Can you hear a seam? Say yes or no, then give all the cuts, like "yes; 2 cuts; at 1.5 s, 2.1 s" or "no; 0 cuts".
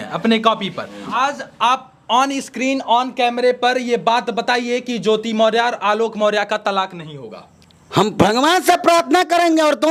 no; 0 cuts